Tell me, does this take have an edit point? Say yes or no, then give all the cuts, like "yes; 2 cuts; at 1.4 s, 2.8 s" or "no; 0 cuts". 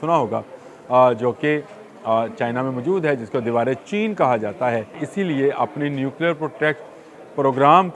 yes; 1 cut; at 5.1 s